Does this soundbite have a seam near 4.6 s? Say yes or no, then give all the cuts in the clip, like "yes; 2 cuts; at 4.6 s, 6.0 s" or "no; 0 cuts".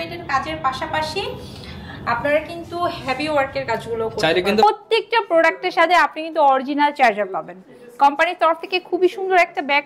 yes; 1 cut; at 4.6 s